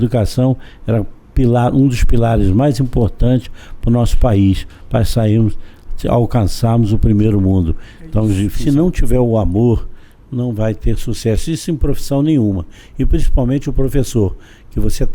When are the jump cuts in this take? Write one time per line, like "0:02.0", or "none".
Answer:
0:08.5